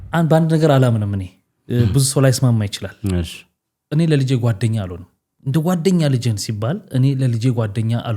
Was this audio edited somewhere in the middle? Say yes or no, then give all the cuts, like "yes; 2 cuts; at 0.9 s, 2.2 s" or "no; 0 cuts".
no; 0 cuts